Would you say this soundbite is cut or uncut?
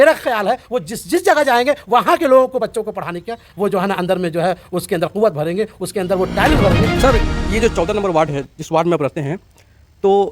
cut